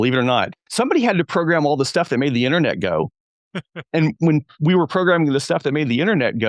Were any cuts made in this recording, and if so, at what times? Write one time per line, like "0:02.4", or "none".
0:04.2